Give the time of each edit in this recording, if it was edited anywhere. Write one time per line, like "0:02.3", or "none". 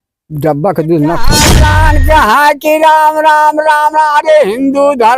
0:01.6